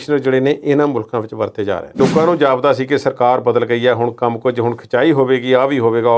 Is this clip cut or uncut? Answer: cut